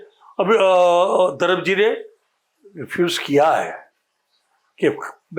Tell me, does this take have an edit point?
no; 0 cuts

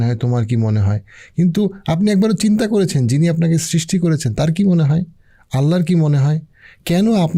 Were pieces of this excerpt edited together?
no; 0 cuts

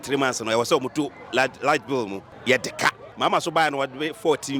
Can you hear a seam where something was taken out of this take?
yes; 2 cuts; at 2.2 s, 3.0 s

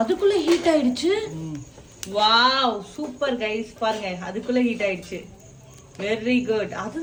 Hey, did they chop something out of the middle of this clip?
no; 0 cuts

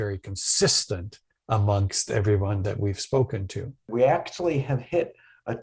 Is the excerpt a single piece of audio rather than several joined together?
no; 1 cut; at 3.8 s

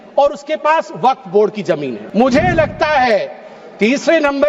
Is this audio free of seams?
no; 1 cut; at 2.0 s

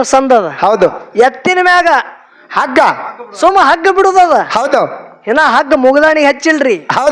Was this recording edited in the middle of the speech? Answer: no; 0 cuts

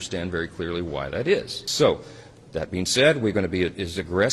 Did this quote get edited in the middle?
yes; 1 cut; at 1.6 s

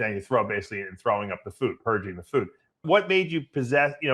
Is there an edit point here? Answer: yes; 1 cut; at 2.8 s

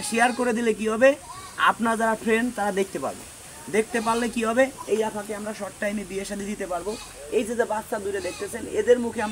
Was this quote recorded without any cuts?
yes; 0 cuts

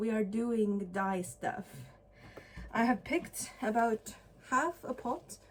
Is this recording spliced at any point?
no; 0 cuts

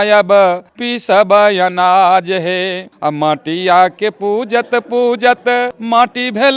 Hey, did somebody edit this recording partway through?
yes; 2 cuts; at 2.9 s, 5.8 s

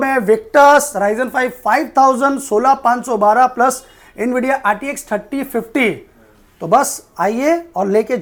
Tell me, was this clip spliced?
no; 0 cuts

